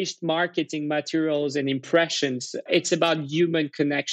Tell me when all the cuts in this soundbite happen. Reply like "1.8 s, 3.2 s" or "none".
2.7 s